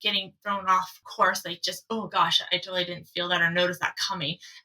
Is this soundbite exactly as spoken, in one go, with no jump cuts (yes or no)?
no